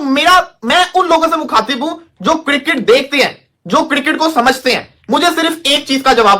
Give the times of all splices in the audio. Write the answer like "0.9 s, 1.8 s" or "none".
none